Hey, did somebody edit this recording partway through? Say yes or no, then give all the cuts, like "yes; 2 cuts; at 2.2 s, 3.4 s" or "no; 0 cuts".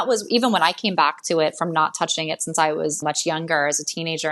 yes; 1 cut; at 3.0 s